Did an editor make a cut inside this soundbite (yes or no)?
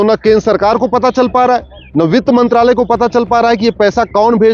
no